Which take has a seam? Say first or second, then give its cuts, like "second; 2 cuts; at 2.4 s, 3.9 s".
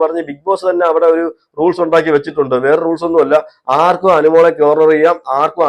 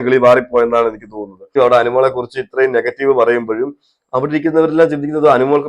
second; 1 cut; at 1.5 s